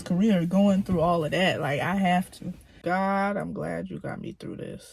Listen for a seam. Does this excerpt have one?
yes; 1 cut; at 2.8 s

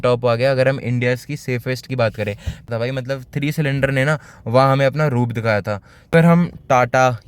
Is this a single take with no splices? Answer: no; 2 cuts; at 2.6 s, 6.1 s

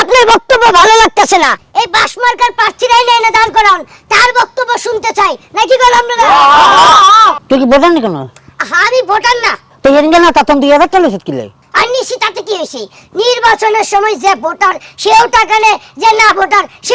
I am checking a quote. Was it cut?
yes; 2 cuts; at 7.3 s, 11.6 s

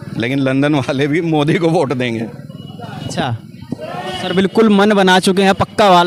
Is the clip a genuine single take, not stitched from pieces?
yes; 0 cuts

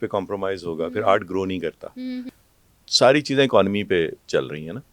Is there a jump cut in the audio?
yes; 1 cut; at 2.3 s

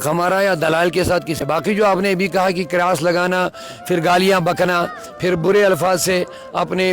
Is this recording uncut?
no; 1 cut; at 1.4 s

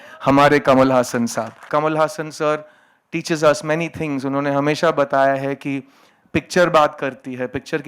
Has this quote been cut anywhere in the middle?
yes; 1 cut; at 1.6 s

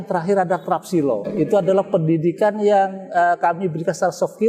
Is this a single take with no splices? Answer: no; 1 cut; at 1.3 s

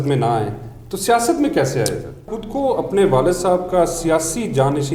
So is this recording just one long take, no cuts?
no; 1 cut; at 2.3 s

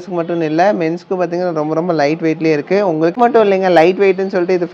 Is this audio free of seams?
yes; 0 cuts

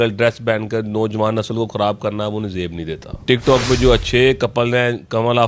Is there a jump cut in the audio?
yes; 1 cut; at 3.2 s

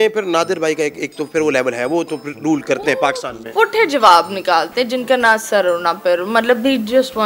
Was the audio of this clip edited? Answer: no; 0 cuts

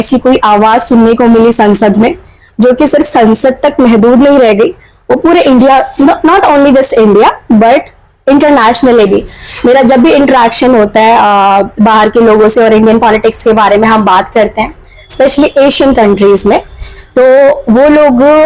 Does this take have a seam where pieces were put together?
no; 0 cuts

